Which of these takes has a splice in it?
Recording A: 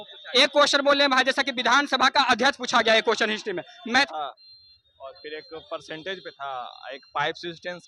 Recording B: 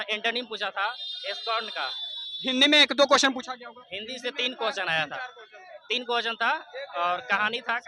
A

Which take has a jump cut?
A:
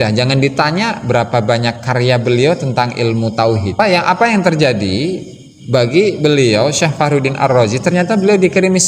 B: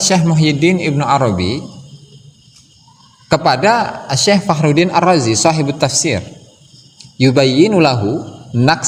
A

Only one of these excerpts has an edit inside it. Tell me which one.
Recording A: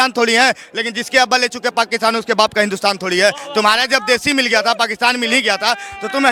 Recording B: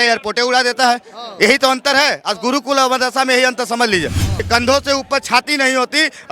B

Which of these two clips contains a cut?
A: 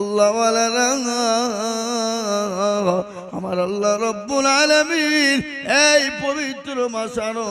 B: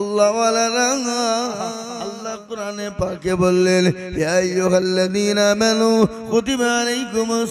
B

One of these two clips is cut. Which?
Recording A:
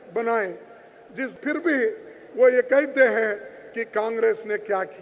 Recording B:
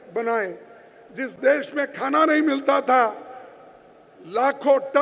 A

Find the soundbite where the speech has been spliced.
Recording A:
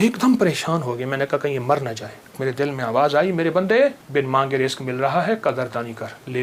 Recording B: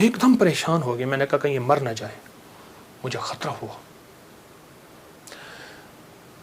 A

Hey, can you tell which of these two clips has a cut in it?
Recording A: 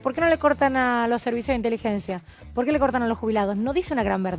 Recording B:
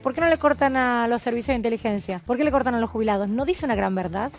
B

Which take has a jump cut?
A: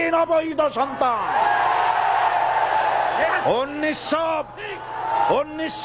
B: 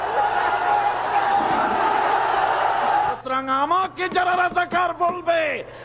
B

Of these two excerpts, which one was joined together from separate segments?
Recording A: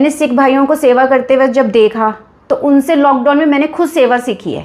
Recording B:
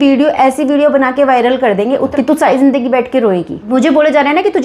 B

